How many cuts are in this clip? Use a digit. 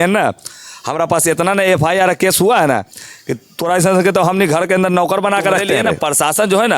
1